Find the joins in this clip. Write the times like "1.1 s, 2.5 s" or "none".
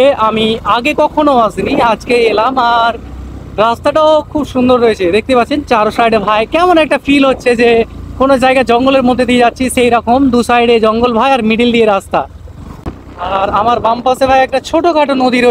12.9 s